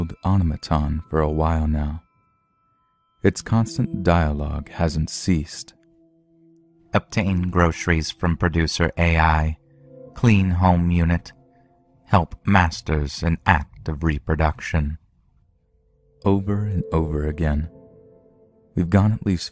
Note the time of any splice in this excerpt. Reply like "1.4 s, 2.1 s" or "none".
7.3 s